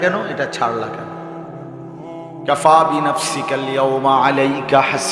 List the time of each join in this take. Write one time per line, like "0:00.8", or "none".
none

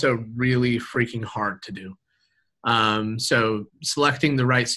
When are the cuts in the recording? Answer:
none

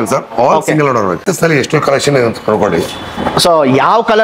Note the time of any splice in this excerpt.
0:01.3

